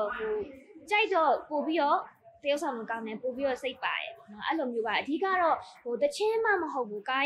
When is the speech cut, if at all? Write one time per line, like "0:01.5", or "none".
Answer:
none